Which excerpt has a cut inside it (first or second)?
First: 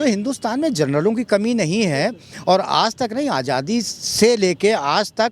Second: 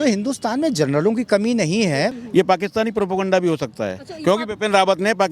second